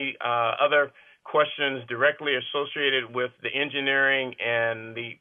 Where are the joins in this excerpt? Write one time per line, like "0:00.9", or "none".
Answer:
none